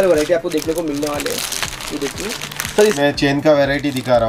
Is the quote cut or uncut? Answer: cut